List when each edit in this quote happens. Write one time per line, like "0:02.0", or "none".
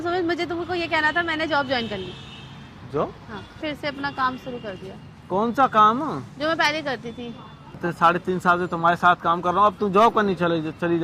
0:03.6
0:07.8